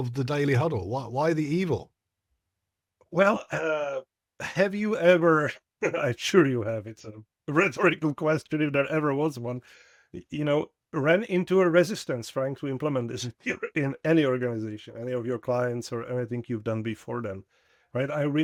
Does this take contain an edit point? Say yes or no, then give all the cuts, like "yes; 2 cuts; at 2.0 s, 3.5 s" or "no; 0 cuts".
no; 0 cuts